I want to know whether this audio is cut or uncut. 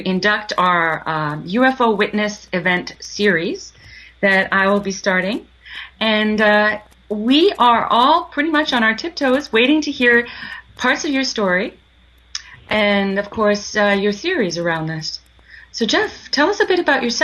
cut